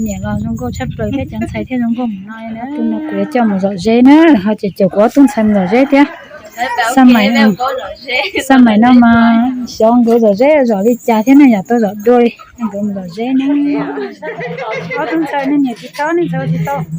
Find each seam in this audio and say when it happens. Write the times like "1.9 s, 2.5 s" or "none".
2.7 s, 13.9 s